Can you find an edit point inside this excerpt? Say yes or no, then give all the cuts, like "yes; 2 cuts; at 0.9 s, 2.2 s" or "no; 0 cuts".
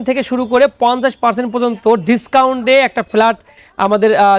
no; 0 cuts